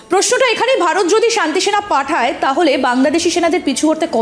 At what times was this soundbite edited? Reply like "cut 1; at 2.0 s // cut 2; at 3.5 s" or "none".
none